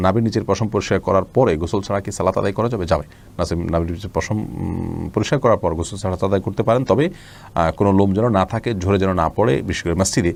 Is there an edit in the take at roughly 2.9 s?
no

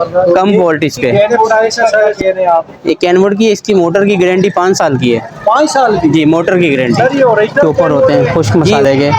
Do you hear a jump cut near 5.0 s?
no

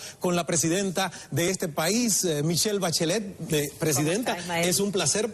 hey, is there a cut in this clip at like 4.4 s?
yes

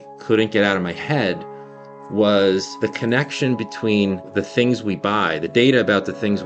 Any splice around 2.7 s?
yes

